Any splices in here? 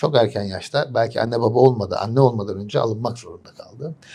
no; 0 cuts

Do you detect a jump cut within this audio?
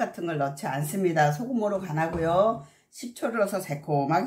no; 0 cuts

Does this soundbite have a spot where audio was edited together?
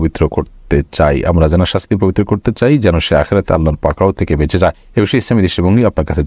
yes; 1 cut; at 4.8 s

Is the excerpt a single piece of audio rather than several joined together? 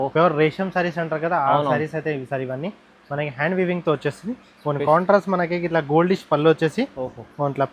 yes; 0 cuts

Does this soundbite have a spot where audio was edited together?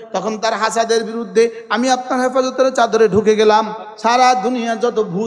yes; 1 cut; at 3.8 s

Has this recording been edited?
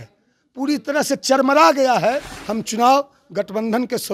yes; 1 cut; at 2.3 s

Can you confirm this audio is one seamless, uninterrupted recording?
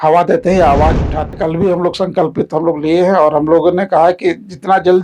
no; 1 cut; at 1.4 s

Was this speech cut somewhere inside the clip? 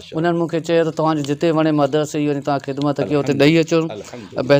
no; 0 cuts

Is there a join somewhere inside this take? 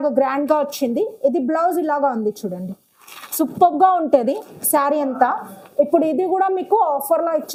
no; 0 cuts

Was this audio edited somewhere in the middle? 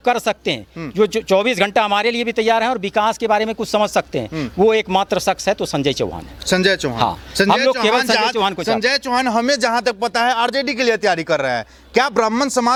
no; 0 cuts

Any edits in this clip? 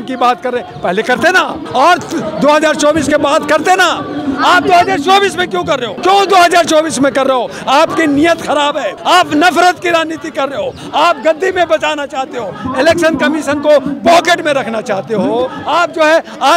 yes; 5 cuts; at 1.6 s, 5.9 s, 8.9 s, 12.6 s, 15.6 s

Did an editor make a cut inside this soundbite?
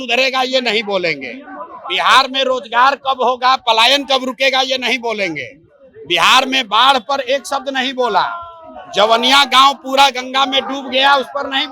no; 0 cuts

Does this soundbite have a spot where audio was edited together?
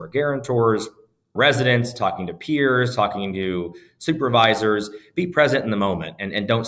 no; 0 cuts

